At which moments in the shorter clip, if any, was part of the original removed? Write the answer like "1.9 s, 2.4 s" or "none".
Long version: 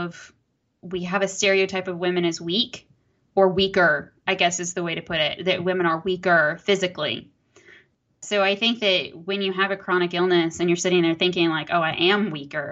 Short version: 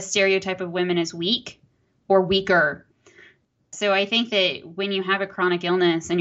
2.9 s